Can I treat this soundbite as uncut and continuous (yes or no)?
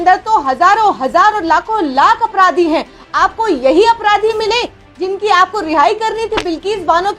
yes